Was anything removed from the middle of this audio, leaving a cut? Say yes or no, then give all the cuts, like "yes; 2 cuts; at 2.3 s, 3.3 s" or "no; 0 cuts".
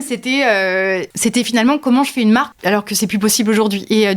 yes; 2 cuts; at 1.1 s, 2.5 s